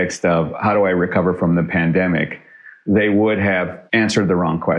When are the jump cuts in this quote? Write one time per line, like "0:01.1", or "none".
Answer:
0:03.8